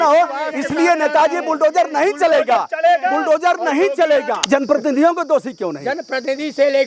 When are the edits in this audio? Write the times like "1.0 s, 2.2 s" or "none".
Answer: 4.4 s